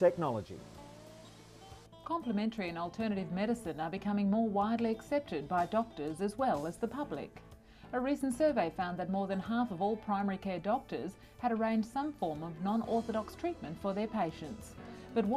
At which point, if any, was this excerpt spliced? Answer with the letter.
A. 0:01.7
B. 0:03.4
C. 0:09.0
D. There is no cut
B